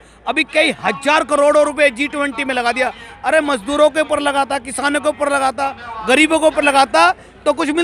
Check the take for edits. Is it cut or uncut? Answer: uncut